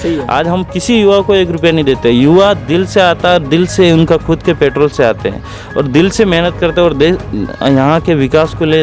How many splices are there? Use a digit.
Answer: 0